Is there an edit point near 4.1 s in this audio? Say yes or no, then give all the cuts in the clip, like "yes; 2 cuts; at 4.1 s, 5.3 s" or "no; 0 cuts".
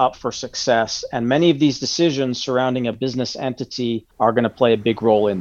yes; 1 cut; at 4.1 s